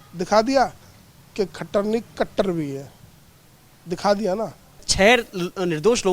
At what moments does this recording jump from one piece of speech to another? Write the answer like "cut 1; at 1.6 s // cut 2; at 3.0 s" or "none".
cut 1; at 4.9 s